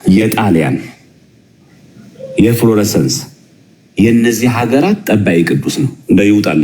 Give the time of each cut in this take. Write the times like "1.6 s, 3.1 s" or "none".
none

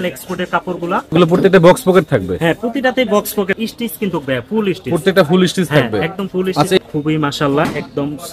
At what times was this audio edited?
1.1 s, 3.6 s, 6.8 s

